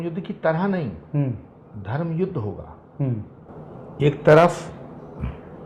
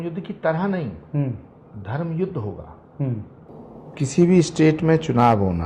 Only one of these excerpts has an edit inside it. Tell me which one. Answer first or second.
second